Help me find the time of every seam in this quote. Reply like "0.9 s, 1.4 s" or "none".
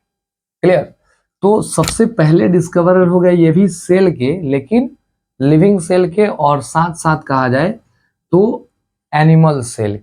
none